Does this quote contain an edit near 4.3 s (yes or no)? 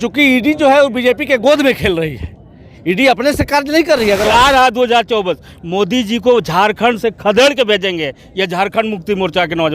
yes